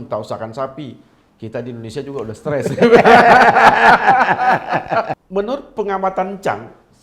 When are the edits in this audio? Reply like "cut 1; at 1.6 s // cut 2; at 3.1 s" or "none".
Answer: cut 1; at 5.2 s